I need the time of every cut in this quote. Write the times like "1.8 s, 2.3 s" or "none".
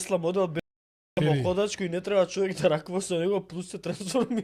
none